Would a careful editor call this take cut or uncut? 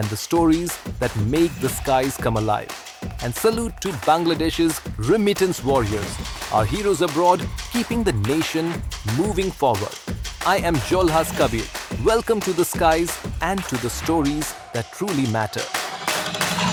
uncut